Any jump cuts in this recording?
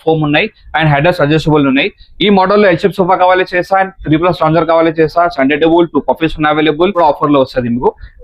yes; 1 cut; at 7.0 s

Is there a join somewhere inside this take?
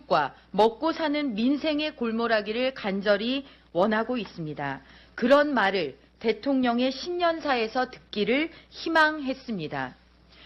no; 0 cuts

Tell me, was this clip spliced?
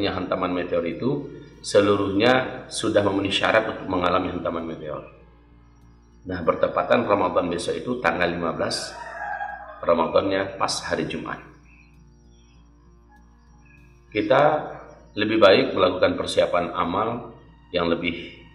no; 0 cuts

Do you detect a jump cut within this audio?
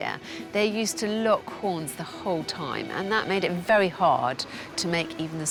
no; 0 cuts

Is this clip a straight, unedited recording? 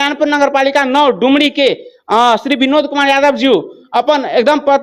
yes; 0 cuts

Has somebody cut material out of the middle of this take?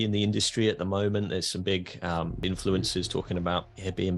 yes; 1 cut; at 2.4 s

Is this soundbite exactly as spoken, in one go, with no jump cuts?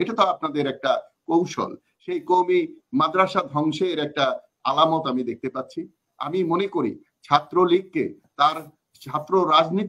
no; 1 cut; at 1.8 s

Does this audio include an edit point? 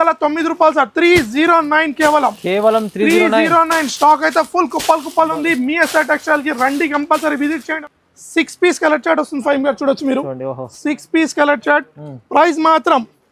yes; 1 cut; at 7.8 s

